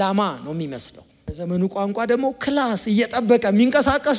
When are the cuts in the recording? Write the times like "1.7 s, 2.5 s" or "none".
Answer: 1.3 s